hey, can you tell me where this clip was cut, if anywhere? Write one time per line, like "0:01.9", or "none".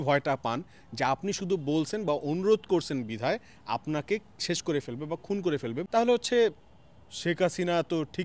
0:05.8